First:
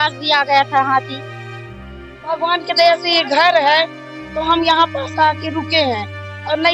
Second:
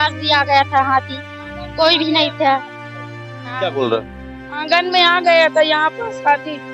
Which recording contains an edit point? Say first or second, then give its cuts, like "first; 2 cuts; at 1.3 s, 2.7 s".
first; 1 cut; at 1.6 s